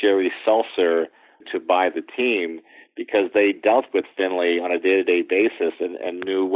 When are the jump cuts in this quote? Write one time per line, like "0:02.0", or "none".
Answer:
0:01.5